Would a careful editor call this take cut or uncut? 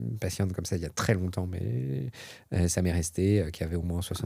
uncut